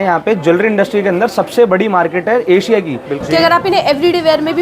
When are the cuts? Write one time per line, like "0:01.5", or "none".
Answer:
0:03.1